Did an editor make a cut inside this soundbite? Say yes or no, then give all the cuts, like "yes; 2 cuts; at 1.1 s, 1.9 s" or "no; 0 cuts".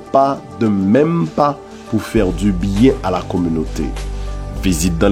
no; 0 cuts